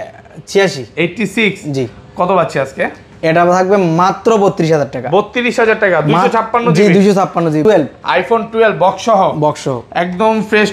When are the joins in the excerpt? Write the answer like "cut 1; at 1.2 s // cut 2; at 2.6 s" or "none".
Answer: cut 1; at 7.6 s